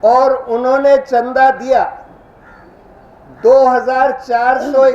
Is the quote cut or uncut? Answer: uncut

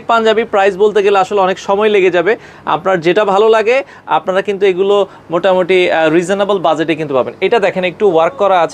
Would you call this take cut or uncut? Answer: uncut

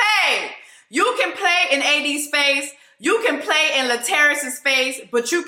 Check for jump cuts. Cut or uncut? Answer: uncut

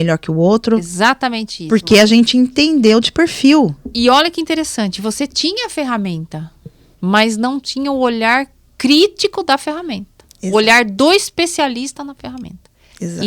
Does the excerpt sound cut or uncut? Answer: uncut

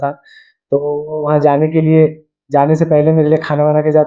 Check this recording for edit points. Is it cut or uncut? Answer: uncut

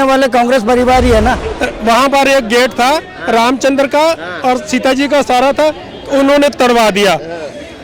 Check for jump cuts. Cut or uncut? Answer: cut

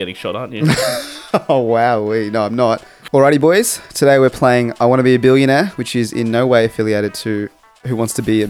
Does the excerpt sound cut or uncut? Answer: cut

